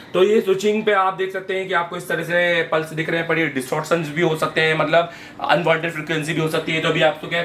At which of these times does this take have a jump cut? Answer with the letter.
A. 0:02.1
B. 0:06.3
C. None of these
C